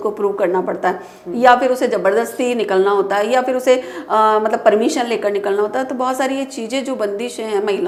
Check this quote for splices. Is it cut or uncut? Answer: uncut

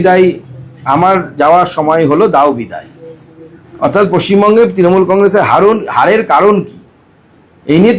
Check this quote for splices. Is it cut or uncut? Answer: uncut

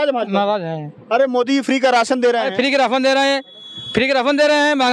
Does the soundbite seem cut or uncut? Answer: uncut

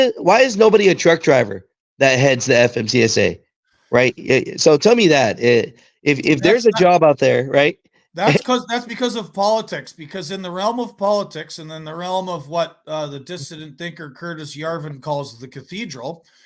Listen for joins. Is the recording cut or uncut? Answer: uncut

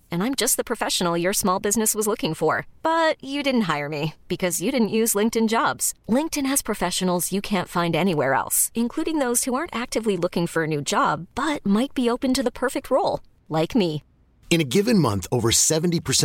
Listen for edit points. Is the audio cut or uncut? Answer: uncut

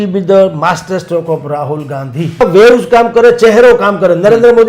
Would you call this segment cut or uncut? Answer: cut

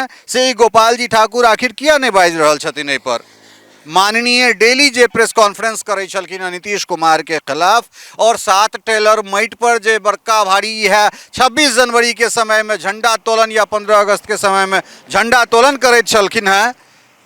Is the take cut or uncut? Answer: uncut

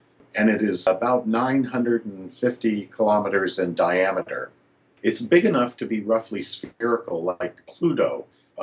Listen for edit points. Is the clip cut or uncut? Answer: uncut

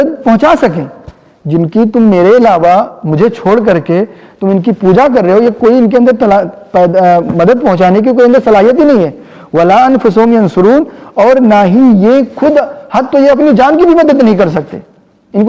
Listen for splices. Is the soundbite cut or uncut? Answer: uncut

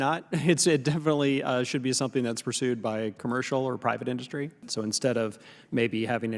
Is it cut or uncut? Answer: cut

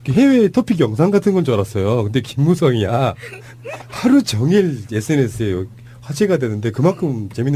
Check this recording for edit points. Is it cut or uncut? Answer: cut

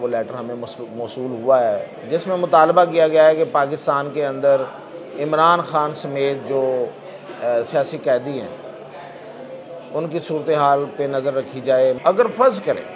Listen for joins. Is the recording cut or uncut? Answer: cut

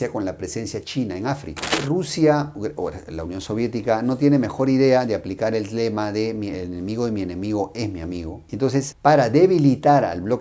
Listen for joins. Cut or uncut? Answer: cut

